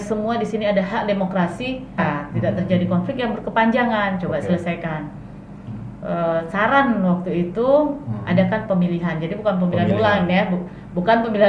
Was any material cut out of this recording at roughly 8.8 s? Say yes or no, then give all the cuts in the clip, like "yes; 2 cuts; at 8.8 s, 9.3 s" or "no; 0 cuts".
no; 1 cut; at 2.0 s